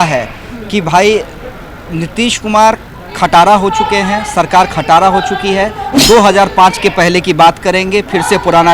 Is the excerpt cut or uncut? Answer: uncut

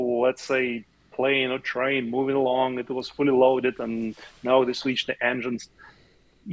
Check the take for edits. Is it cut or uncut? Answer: uncut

